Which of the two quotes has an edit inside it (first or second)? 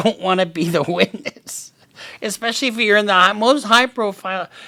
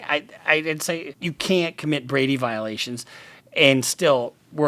second